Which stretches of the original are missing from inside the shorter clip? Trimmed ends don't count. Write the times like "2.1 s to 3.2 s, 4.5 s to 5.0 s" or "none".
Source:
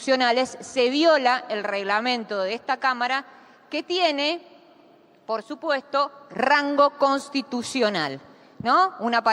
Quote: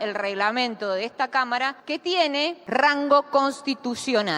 3.3 s to 3.6 s, 4.4 s to 6.3 s